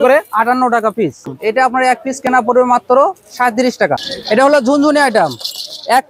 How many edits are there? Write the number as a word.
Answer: two